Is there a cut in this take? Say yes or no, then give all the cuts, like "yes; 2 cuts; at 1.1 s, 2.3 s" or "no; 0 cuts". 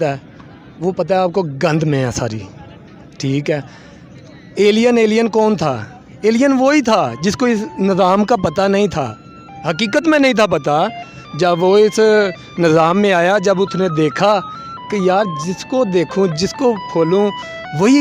no; 0 cuts